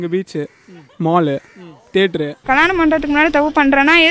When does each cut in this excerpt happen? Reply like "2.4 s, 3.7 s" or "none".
2.5 s